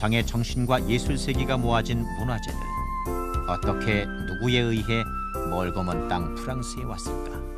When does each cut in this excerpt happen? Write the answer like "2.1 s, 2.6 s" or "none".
1.7 s